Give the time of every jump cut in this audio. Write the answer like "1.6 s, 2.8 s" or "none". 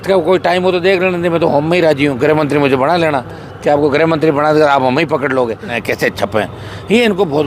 5.8 s